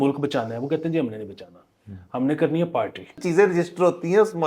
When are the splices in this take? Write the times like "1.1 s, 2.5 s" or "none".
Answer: 3.2 s